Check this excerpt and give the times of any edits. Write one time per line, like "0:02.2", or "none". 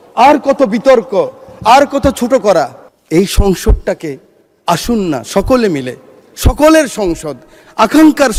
none

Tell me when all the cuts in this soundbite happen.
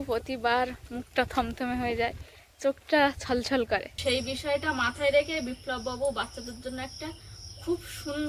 0:04.0

